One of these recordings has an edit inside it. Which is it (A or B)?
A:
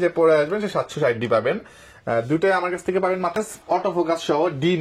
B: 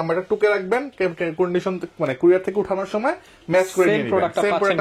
A